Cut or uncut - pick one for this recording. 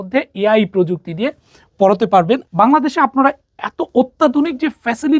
cut